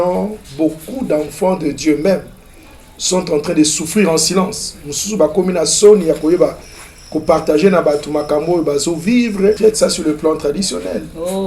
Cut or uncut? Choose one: cut